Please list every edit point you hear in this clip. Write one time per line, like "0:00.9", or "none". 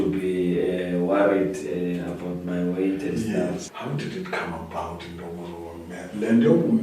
0:03.7

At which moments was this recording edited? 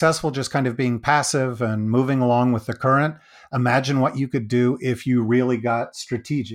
none

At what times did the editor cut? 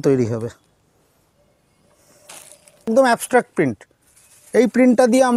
0:02.9

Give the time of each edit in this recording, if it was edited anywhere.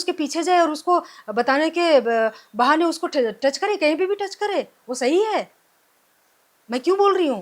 none

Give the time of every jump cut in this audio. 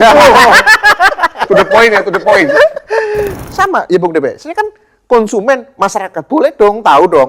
0:03.4

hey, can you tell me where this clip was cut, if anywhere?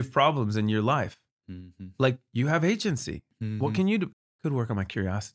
0:04.1

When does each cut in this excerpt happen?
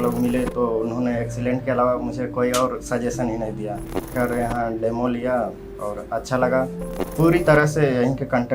0:04.1
0:07.0

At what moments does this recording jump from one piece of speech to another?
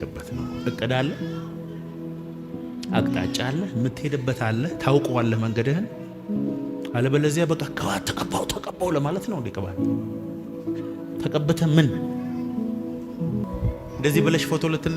0:13.4

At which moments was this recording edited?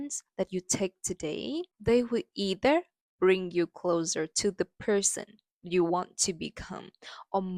none

